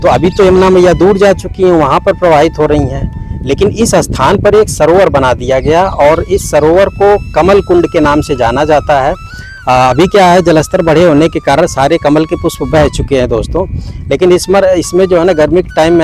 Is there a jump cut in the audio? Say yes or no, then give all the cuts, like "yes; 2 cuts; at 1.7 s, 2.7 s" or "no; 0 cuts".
no; 0 cuts